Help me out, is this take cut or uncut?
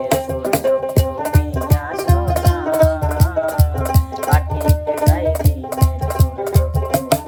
uncut